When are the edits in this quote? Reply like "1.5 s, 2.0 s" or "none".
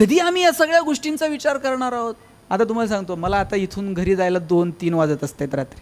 2.3 s